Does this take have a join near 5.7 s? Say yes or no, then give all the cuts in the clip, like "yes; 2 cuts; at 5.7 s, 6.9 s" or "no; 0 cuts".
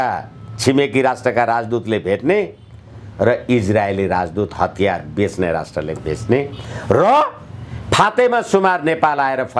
no; 0 cuts